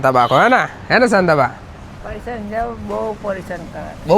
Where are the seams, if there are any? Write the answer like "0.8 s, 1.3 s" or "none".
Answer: none